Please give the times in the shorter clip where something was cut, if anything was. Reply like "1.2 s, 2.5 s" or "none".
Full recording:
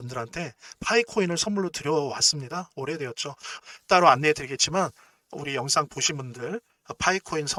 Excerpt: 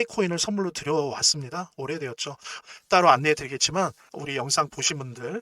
4.1 s